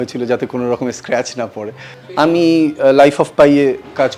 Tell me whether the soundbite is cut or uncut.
cut